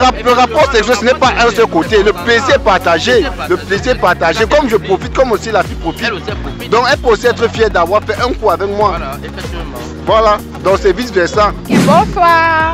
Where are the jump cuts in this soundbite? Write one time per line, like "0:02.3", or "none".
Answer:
none